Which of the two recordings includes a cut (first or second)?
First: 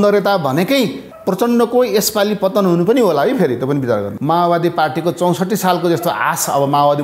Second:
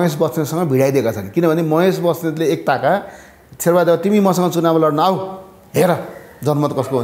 first